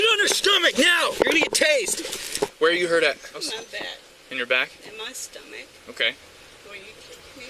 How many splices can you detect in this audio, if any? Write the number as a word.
two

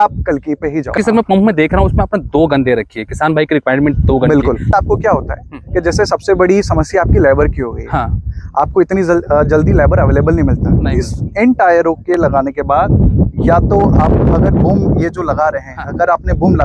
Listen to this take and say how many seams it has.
two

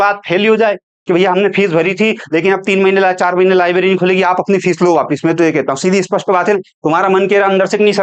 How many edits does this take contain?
two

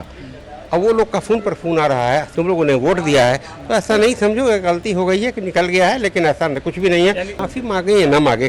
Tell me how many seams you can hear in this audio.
two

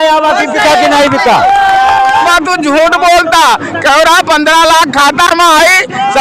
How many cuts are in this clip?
one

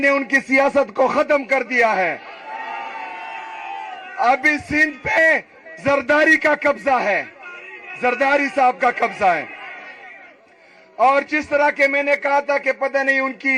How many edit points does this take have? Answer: zero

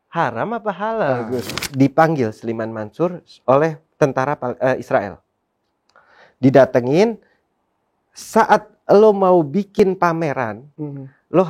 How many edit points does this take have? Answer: one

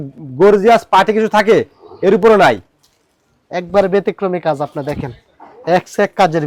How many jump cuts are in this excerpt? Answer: zero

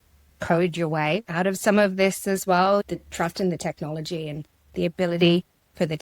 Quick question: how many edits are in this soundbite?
one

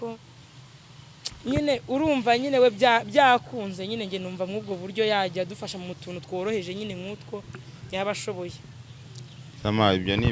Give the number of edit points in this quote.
zero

